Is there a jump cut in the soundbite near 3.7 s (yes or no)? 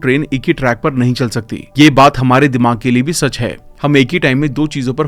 no